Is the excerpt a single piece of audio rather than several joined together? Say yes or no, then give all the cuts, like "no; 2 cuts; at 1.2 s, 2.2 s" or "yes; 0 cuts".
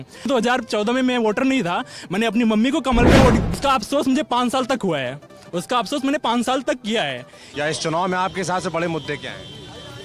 no; 1 cut; at 7.3 s